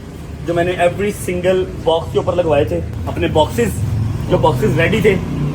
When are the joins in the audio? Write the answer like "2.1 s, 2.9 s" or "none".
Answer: 3.0 s